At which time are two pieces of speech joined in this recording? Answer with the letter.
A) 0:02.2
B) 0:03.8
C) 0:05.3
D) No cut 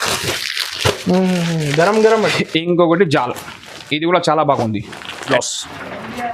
C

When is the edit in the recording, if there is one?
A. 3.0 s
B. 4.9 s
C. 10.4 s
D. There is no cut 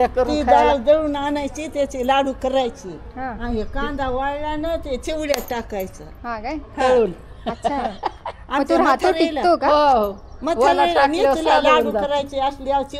D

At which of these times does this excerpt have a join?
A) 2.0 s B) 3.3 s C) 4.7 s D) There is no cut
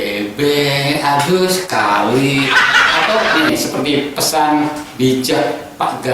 B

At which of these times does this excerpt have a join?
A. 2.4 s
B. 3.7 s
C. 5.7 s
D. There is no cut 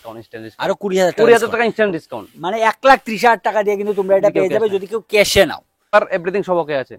D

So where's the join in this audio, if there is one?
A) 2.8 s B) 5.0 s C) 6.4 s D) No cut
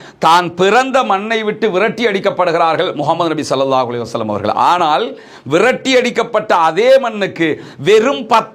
D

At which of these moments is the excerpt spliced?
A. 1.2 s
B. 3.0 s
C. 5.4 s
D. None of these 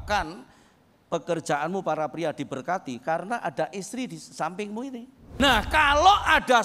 C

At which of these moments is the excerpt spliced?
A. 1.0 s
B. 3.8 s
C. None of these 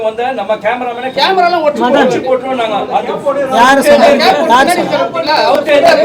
A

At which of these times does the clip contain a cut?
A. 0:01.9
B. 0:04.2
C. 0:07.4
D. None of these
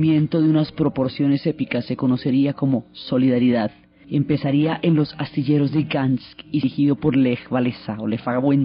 B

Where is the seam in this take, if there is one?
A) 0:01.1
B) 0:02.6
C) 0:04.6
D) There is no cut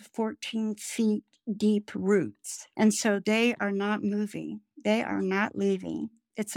C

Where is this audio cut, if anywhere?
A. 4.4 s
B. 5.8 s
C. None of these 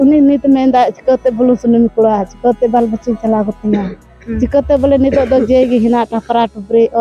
C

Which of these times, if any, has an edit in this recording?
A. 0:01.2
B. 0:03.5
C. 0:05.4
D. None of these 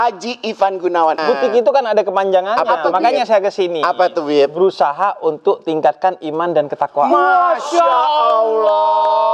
A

